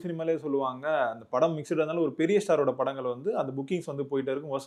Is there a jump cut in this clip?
no; 0 cuts

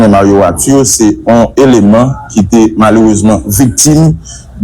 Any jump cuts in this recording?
yes; 2 cuts; at 1.1 s, 3.8 s

